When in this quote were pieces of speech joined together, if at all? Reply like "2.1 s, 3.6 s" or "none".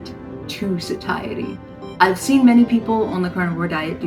none